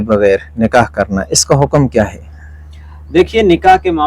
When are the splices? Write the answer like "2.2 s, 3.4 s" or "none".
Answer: none